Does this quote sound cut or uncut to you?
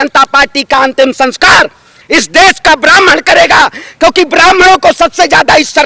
uncut